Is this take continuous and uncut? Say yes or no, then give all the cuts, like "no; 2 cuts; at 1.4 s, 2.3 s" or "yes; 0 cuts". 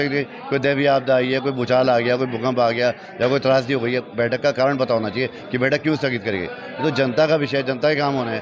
yes; 0 cuts